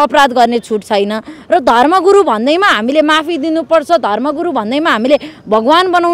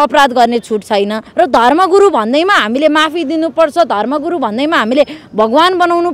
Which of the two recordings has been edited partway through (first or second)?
second